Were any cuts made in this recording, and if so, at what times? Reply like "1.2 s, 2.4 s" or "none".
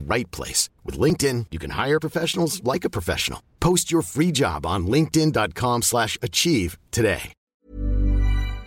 7.4 s